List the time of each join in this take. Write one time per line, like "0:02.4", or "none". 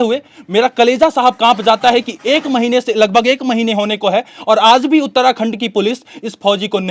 none